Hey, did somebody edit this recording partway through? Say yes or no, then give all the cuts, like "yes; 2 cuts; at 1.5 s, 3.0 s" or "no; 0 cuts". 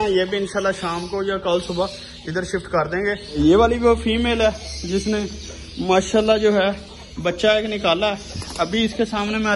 yes; 1 cut; at 3.4 s